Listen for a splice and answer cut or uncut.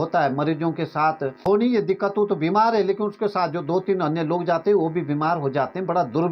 cut